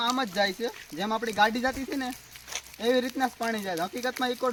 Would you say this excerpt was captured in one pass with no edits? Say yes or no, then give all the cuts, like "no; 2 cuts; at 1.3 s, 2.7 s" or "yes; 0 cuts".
yes; 0 cuts